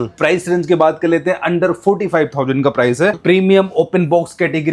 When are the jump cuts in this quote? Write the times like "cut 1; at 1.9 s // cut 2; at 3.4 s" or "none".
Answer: cut 1; at 3.2 s